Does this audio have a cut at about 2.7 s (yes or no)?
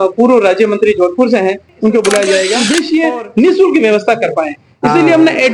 yes